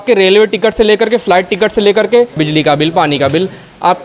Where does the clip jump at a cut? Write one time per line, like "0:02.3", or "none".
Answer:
0:02.4